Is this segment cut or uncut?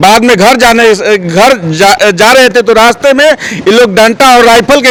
uncut